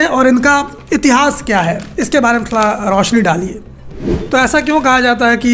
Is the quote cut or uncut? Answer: cut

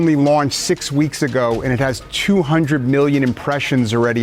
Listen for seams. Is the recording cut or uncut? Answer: uncut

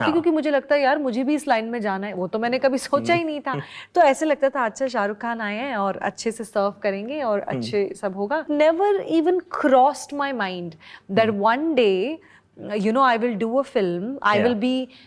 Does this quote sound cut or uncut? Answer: uncut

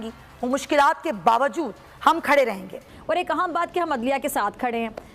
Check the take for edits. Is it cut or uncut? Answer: cut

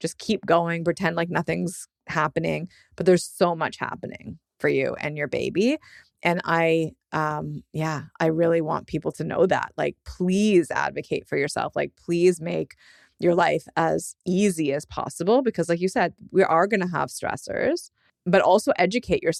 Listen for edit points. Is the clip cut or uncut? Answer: uncut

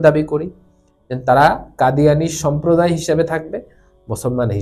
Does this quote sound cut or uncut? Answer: uncut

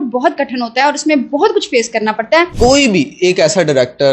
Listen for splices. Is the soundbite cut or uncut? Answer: cut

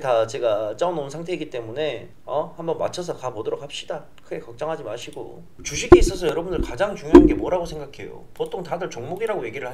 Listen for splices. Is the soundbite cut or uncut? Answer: cut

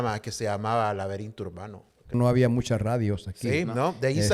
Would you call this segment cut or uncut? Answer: cut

